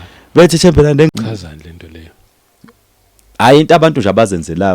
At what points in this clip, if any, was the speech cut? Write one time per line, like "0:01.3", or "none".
0:01.1